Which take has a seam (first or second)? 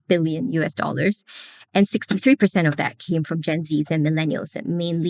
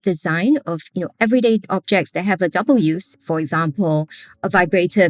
second